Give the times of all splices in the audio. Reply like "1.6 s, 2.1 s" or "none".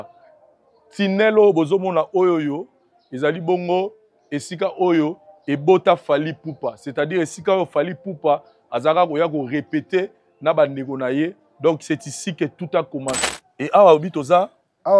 13.2 s